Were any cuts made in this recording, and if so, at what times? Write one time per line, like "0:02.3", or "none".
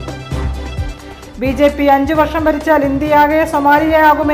none

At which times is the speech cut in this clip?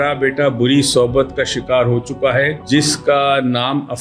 0:02.6

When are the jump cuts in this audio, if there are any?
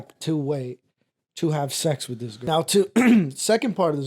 0:02.4

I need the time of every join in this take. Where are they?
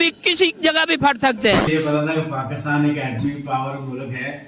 0:01.7

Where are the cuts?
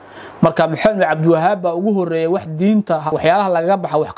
0:03.2

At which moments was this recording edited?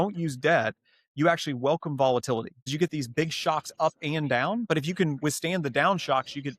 0:02.7

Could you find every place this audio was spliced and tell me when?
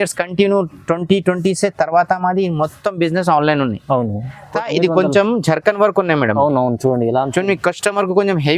0:04.6

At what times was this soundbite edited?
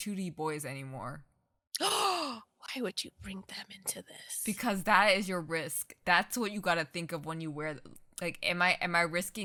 none

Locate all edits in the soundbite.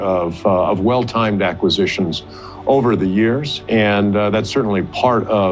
none

